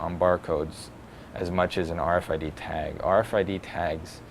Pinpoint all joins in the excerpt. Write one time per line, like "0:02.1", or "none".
0:03.3